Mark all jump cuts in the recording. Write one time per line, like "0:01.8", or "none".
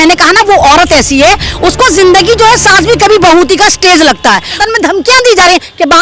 0:04.6